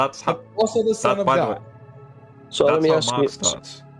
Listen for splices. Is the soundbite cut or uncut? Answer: uncut